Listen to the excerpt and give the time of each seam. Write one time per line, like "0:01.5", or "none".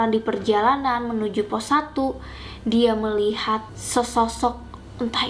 0:03.8